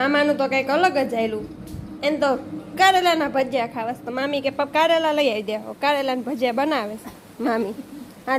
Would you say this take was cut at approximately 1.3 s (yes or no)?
no